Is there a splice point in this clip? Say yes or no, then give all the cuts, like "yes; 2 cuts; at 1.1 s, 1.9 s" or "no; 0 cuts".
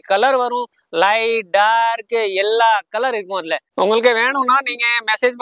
yes; 1 cut; at 3.6 s